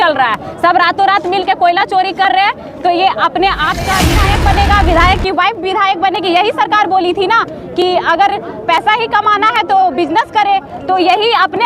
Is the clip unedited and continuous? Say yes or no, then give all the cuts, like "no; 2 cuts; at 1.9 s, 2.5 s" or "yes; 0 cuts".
no; 1 cut; at 4.1 s